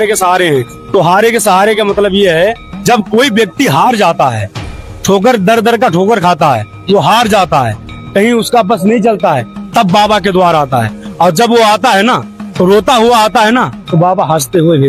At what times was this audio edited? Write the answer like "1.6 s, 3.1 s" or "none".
none